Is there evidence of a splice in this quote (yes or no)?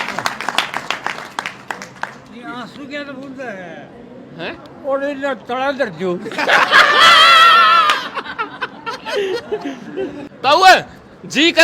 yes